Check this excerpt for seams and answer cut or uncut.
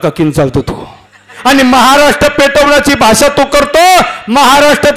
cut